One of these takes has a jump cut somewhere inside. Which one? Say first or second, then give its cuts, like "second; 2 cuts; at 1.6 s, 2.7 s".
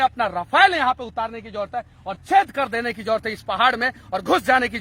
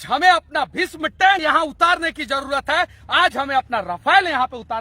second; 1 cut; at 1.4 s